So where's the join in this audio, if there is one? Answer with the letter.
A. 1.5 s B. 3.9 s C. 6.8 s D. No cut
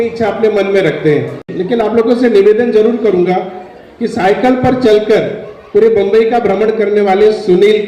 A